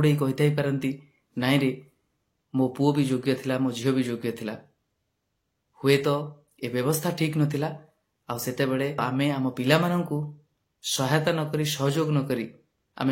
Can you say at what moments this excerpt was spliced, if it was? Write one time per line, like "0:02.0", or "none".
0:09.0